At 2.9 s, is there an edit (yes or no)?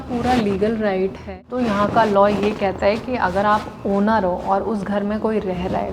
no